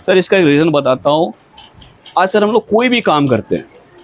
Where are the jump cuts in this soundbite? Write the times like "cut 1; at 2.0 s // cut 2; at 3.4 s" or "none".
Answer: none